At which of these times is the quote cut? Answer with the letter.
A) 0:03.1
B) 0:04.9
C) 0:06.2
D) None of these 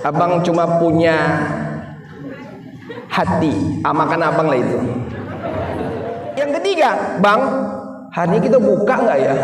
C